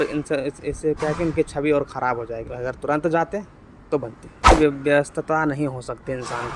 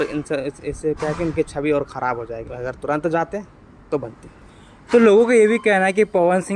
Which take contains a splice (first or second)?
first